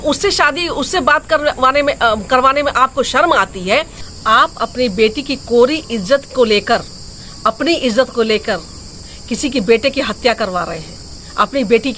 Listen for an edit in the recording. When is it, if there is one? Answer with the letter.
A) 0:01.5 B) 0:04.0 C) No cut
B